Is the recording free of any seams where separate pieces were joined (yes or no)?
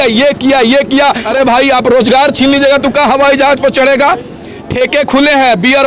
no